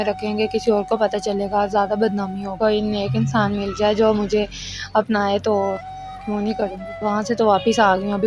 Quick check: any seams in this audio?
yes; 2 cuts; at 2.5 s, 6.9 s

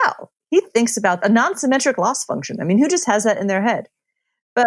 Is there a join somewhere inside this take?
yes; 1 cut; at 1.2 s

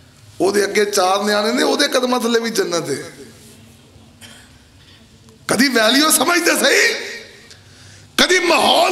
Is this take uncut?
yes; 0 cuts

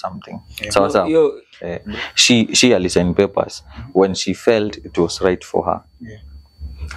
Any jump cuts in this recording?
yes; 1 cut; at 1.8 s

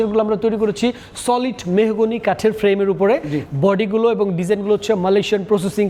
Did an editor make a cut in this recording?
no; 0 cuts

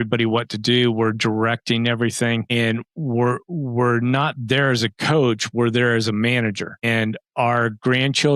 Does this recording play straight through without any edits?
yes; 0 cuts

